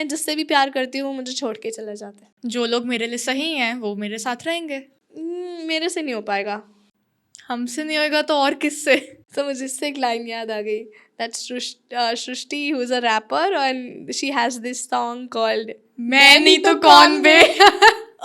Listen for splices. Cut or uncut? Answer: uncut